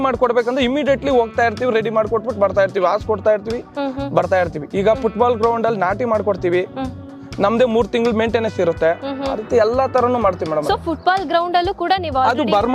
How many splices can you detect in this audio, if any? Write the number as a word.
zero